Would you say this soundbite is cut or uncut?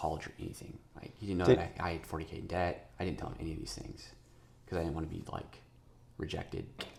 uncut